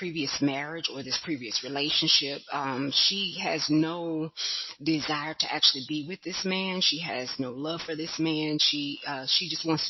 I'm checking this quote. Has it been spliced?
no; 0 cuts

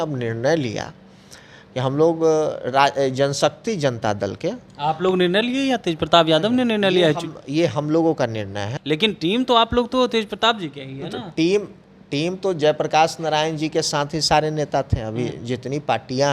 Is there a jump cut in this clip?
yes; 1 cut; at 8.7 s

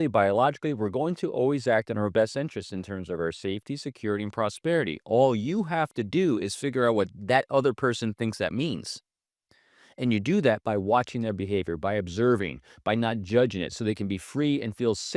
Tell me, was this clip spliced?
no; 0 cuts

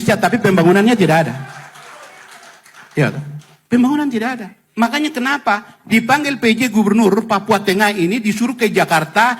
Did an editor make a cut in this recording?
no; 0 cuts

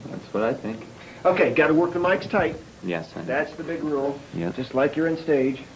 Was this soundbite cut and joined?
yes; 1 cut; at 4.5 s

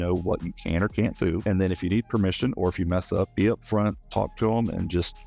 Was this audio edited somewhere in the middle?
yes; 2 cuts; at 1.4 s, 3.3 s

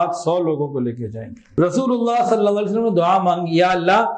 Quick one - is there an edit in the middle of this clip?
yes; 1 cut; at 1.4 s

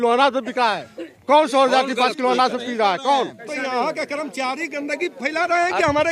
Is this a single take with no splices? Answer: no; 1 cut; at 3.5 s

